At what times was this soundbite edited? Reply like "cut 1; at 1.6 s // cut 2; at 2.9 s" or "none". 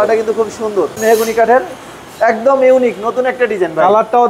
cut 1; at 1.0 s